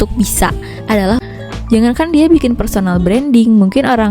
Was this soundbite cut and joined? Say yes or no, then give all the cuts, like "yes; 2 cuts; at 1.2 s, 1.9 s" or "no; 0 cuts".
yes; 1 cut; at 1.2 s